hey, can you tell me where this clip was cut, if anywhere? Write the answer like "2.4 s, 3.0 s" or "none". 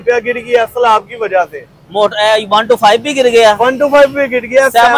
none